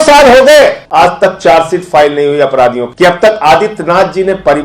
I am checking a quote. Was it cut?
yes; 2 cuts; at 0.8 s, 2.9 s

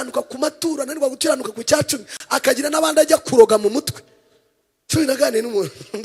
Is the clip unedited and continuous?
yes; 0 cuts

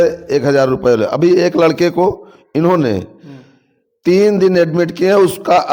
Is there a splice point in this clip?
no; 0 cuts

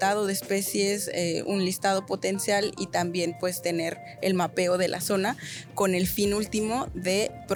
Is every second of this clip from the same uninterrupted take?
yes; 0 cuts

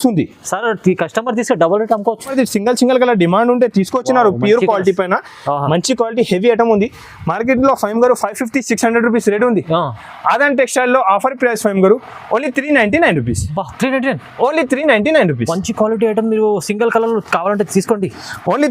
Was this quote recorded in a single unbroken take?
no; 1 cut; at 2.3 s

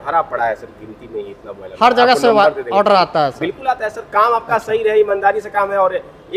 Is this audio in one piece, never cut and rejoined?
yes; 0 cuts

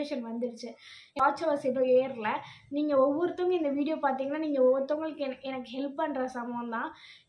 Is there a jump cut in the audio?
yes; 1 cut; at 1.2 s

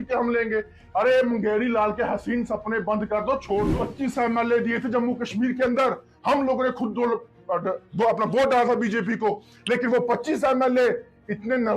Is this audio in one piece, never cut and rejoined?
no; 1 cut; at 3.7 s

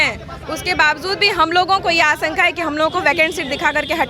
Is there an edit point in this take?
no; 0 cuts

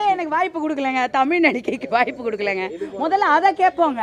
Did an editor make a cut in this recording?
no; 0 cuts

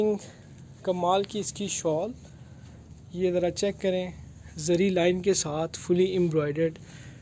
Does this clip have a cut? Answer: no; 0 cuts

